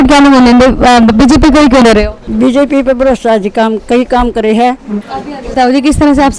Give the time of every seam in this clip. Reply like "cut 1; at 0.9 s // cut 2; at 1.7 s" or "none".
cut 1; at 1.8 s // cut 2; at 5.1 s

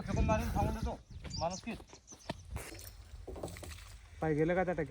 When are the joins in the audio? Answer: cut 1; at 2.7 s

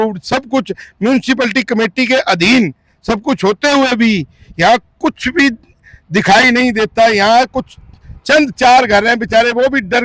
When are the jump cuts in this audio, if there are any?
none

